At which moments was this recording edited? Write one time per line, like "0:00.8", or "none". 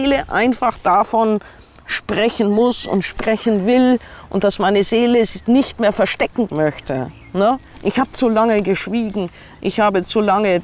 none